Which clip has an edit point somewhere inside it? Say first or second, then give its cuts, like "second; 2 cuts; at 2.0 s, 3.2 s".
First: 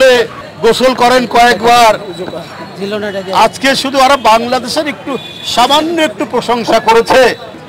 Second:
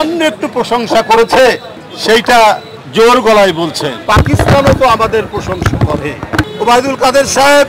second; 2 cuts; at 4.0 s, 6.5 s